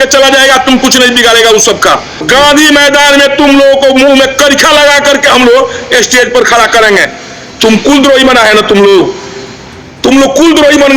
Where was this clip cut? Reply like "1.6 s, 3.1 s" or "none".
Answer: 2.2 s